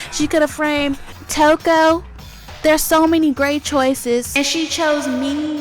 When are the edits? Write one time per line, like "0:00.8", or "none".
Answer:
0:04.3